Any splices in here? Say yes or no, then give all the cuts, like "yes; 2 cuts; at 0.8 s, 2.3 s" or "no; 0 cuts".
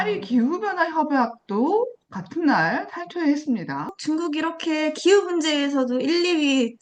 yes; 1 cut; at 3.9 s